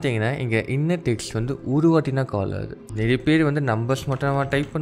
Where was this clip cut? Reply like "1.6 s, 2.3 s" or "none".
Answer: 2.8 s